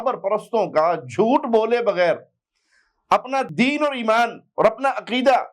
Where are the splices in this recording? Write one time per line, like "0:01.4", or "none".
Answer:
0:03.5